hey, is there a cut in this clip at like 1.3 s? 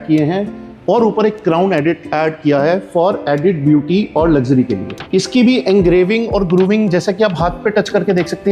no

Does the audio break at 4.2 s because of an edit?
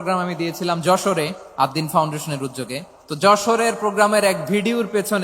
no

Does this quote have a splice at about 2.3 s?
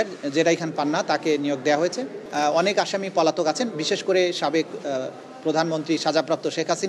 yes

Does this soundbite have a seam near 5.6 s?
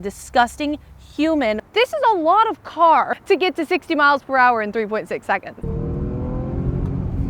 yes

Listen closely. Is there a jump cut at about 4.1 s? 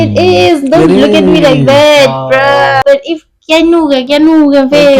no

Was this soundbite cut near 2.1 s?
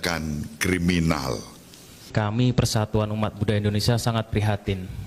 yes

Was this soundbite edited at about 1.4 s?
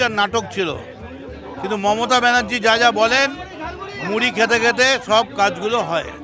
no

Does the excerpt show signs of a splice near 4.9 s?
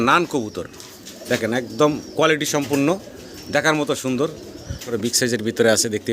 yes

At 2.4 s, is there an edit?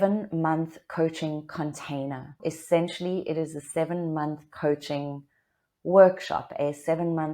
yes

